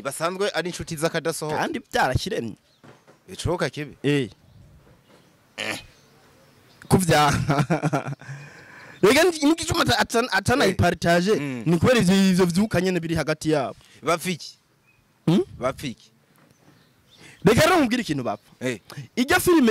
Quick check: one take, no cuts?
yes; 0 cuts

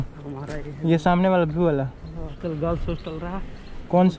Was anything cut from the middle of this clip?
yes; 1 cut; at 2.3 s

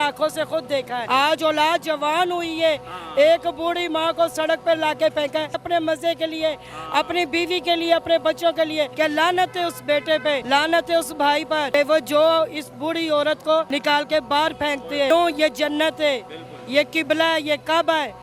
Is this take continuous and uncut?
no; 7 cuts; at 1.0 s, 5.6 s, 8.9 s, 10.4 s, 11.7 s, 13.7 s, 15.1 s

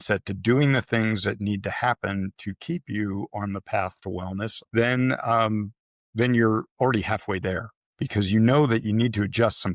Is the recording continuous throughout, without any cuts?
no; 1 cut; at 4.6 s

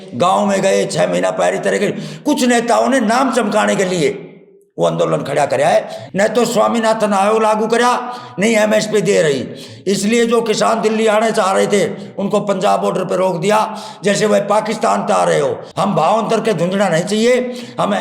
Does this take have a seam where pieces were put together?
yes; 2 cuts; at 6.0 s, 15.6 s

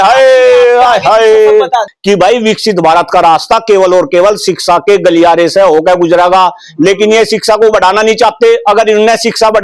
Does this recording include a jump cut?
yes; 1 cut; at 1.9 s

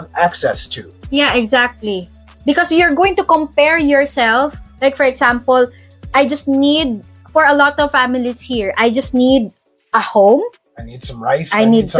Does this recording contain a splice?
no; 0 cuts

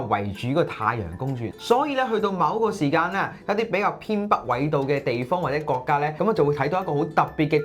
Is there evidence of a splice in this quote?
yes; 2 cuts; at 1.5 s, 6.1 s

